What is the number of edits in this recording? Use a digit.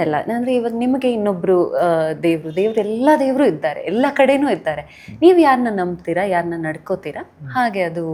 0